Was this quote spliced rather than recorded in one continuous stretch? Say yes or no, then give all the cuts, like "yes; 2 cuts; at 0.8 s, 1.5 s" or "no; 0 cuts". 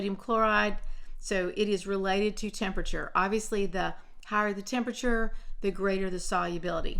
no; 0 cuts